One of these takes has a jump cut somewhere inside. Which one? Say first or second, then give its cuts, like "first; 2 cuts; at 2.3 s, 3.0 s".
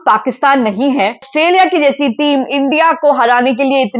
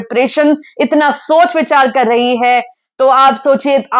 first; 1 cut; at 1.3 s